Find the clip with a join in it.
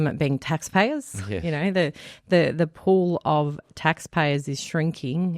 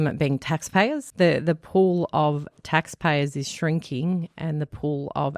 second; 1 cut; at 1.0 s

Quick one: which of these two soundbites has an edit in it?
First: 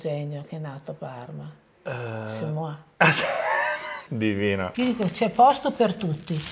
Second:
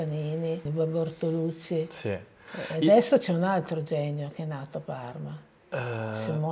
first; 2 cuts; at 4.0 s, 4.7 s

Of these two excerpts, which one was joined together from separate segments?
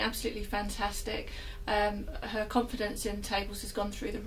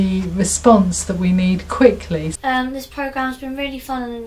second; 1 cut; at 2.3 s

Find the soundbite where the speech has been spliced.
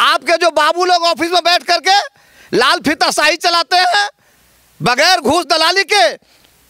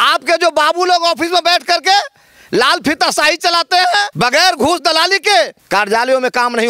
second; 2 cuts; at 4.1 s, 5.6 s

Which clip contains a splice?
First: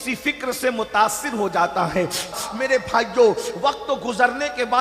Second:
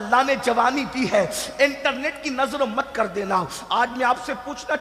first; 1 cut; at 2.3 s

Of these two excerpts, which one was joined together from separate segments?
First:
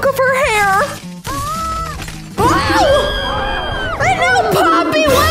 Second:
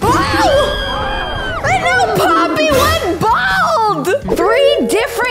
second; 1 cut; at 4.3 s

